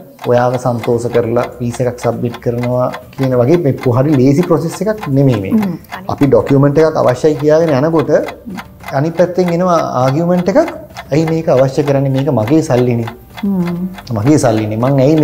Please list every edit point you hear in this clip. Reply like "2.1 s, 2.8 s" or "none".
5.8 s